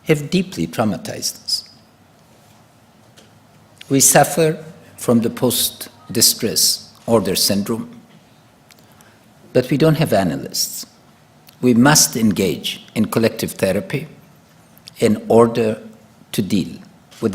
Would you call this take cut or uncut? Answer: uncut